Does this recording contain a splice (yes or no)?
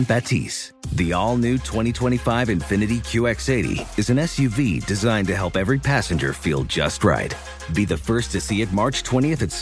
no